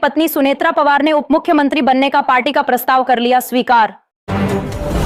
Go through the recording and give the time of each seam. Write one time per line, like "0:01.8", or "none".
0:04.1